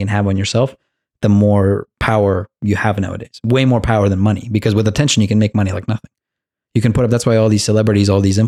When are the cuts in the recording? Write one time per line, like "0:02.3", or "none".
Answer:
none